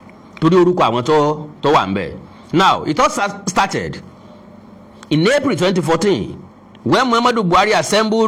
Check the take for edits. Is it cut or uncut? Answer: uncut